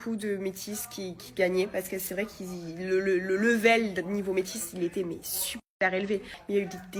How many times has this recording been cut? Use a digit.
0